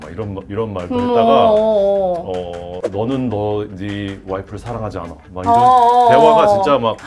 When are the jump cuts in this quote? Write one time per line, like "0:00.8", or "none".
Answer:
0:02.8